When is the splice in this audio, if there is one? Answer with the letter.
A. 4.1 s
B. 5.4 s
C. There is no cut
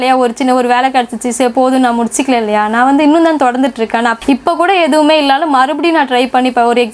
A